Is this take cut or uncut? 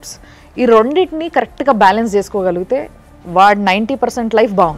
uncut